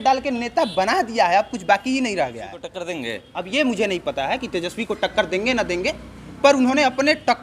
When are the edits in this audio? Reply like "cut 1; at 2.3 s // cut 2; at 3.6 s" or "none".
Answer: cut 1; at 2.8 s